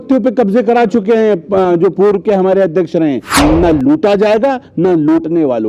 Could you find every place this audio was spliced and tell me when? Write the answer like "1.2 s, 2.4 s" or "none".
3.3 s